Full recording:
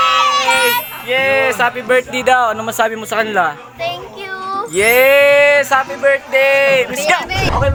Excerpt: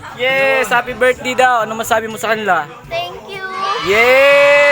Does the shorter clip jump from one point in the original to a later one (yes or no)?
no